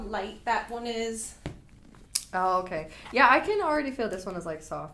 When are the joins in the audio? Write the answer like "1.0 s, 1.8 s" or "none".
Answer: none